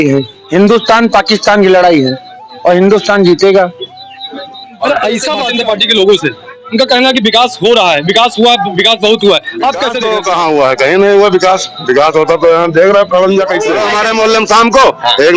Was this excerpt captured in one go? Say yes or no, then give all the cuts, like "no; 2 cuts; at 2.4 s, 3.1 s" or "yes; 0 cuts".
no; 3 cuts; at 5.4 s, 10.0 s, 13.9 s